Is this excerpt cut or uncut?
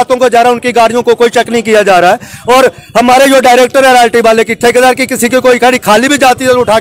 uncut